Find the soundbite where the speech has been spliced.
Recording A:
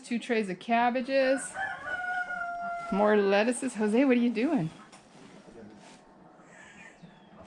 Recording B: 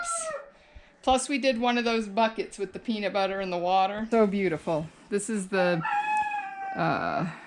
B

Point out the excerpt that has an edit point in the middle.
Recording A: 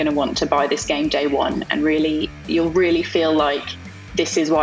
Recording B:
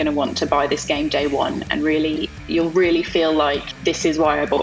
B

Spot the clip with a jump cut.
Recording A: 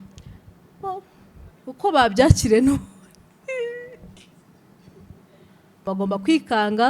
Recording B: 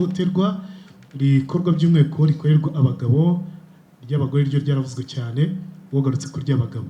A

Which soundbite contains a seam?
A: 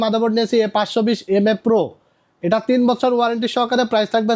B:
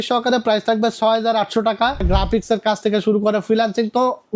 B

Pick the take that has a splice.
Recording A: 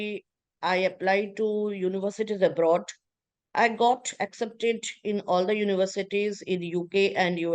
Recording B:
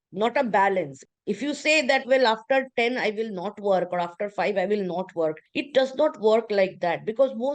B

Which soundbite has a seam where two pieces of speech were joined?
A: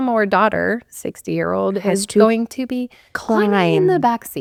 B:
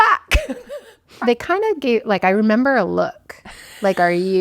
B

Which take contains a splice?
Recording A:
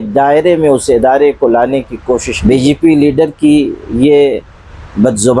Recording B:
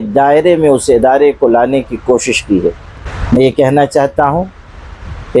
A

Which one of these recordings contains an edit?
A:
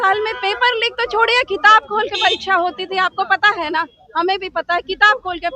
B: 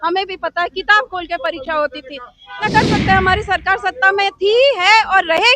B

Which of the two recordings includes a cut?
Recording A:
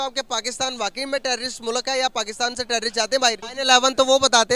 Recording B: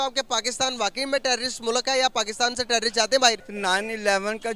A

